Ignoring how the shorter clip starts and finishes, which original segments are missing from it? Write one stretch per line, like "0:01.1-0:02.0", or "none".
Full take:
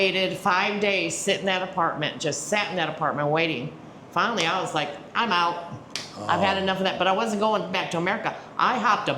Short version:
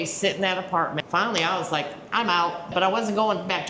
0:02.1-0:04.0
0:05.7-0:06.9